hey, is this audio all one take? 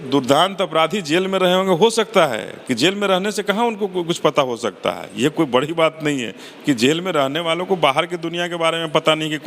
yes; 0 cuts

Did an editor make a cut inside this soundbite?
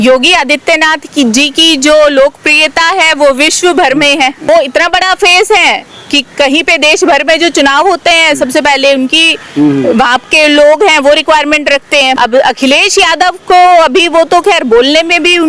yes; 2 cuts; at 4.4 s, 12.2 s

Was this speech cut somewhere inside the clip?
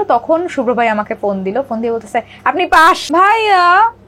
yes; 1 cut; at 3.0 s

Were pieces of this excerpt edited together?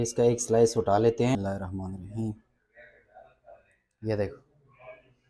yes; 1 cut; at 1.3 s

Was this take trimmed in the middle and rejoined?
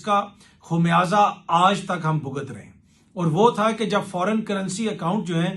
no; 0 cuts

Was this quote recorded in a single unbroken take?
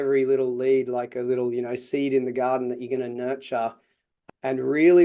no; 1 cut; at 4.1 s

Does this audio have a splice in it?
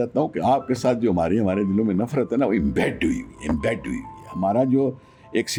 no; 0 cuts

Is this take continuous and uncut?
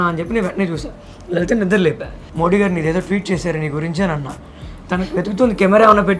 no; 2 cuts; at 2.2 s, 4.7 s

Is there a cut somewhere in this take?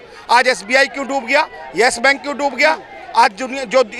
no; 0 cuts

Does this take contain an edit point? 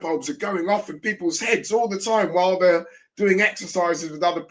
no; 0 cuts

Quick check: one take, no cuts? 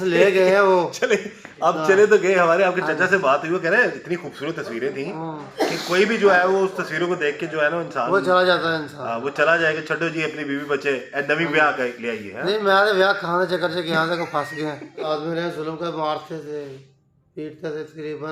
no; 1 cut; at 15.1 s

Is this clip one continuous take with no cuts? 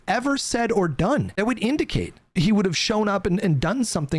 no; 2 cuts; at 1.3 s, 2.3 s

